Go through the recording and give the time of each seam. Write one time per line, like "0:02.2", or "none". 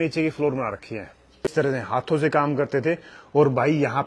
0:01.5